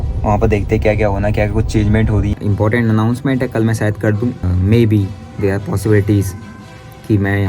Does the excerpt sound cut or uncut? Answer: cut